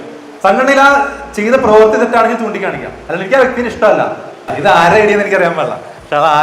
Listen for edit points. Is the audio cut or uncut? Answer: cut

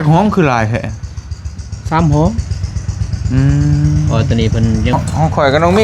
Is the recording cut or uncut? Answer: cut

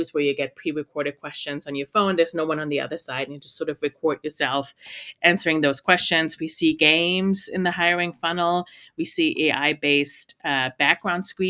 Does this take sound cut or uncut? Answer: uncut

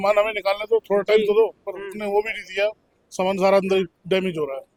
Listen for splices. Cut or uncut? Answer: uncut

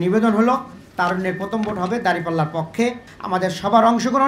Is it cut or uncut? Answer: cut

